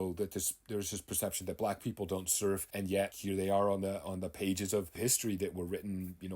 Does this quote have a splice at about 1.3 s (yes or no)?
no